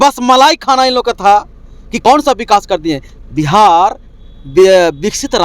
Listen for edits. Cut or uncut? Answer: cut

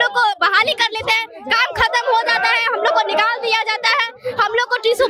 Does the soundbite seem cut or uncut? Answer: uncut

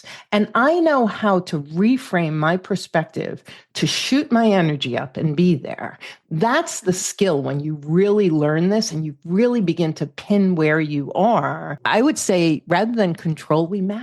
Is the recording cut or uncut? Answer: cut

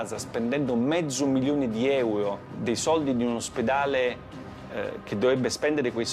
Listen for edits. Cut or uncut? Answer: cut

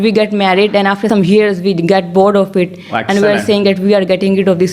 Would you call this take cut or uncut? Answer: cut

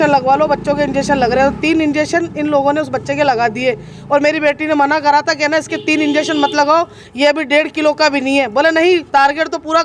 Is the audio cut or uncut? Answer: uncut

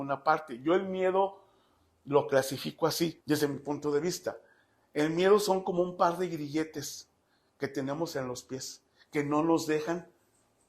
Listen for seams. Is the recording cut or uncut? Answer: cut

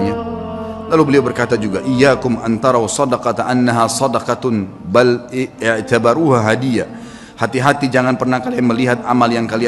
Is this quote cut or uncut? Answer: uncut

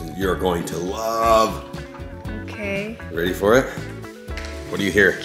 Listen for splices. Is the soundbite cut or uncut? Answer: uncut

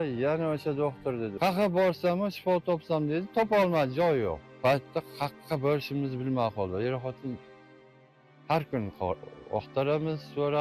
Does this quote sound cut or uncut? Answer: cut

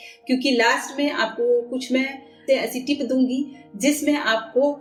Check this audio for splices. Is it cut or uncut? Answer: uncut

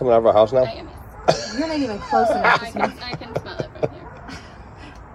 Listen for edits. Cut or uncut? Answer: uncut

